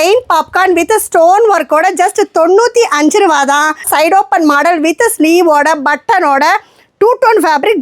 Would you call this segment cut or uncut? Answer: cut